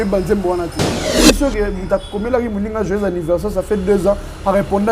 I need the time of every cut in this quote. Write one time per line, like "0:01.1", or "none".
0:01.2